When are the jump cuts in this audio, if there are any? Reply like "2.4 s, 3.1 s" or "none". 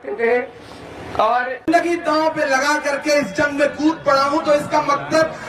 1.7 s